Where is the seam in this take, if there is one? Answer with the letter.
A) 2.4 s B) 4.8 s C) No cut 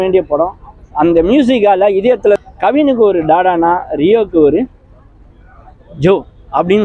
A